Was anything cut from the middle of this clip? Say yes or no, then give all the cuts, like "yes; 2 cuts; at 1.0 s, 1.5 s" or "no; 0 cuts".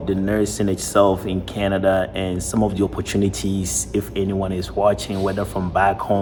no; 0 cuts